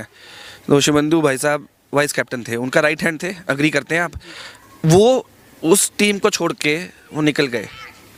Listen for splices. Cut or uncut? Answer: uncut